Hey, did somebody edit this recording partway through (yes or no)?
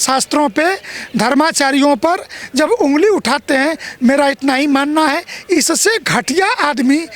no